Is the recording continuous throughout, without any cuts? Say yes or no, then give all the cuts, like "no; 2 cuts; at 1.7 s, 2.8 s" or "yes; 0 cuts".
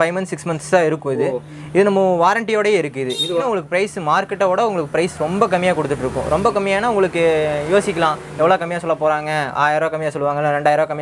no; 1 cut; at 3.4 s